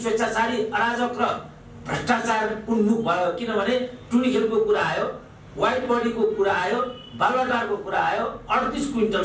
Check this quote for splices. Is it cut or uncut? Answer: uncut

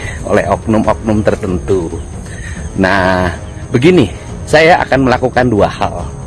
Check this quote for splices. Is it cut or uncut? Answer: uncut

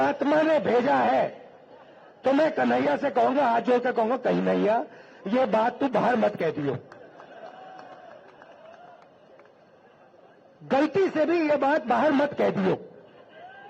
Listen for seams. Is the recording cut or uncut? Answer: uncut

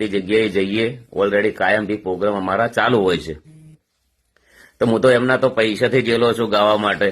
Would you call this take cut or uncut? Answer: uncut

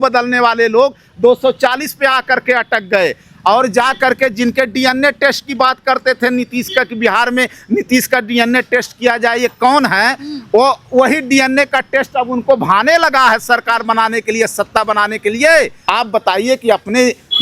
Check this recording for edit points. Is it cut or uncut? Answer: cut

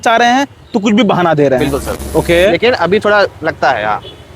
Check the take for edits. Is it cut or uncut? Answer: cut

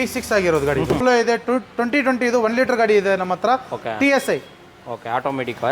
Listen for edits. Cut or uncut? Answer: cut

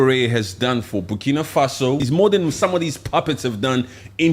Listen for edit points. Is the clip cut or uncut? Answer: cut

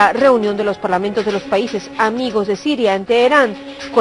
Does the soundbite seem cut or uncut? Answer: uncut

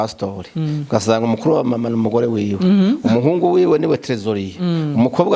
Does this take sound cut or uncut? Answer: uncut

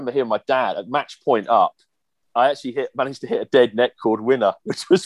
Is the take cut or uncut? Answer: cut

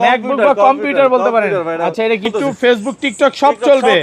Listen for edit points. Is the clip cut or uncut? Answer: cut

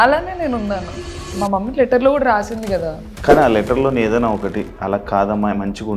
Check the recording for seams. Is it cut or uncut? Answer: cut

